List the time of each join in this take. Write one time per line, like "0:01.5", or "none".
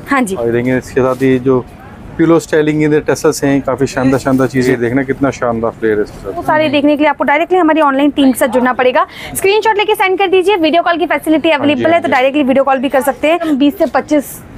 0:04.7
0:06.4
0:13.5